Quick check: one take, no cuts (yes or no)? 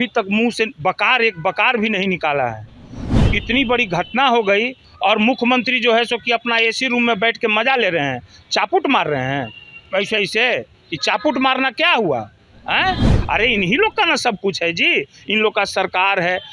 no